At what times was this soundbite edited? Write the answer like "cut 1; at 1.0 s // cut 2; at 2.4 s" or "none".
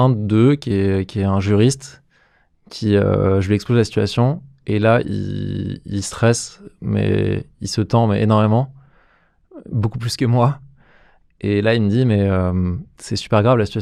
none